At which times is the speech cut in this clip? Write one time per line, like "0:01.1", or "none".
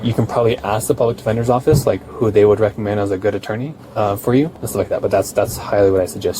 0:03.8
0:04.6